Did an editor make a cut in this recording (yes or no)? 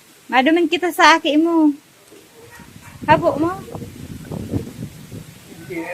yes